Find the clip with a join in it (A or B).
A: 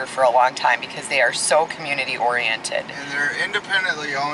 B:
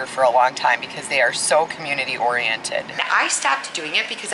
B